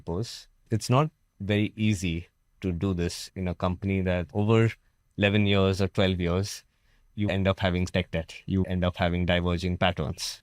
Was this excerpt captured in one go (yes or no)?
no